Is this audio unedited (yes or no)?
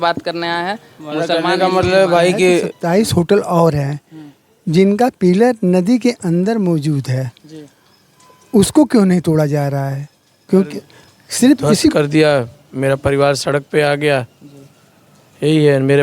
no